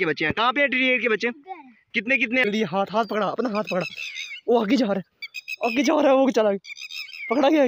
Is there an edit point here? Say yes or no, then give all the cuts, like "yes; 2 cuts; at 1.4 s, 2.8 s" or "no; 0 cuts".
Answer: yes; 1 cut; at 2.4 s